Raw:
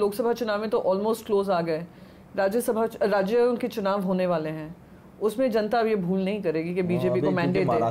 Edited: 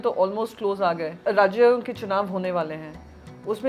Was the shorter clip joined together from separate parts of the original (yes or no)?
yes